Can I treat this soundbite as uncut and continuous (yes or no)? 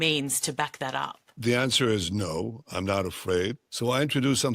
no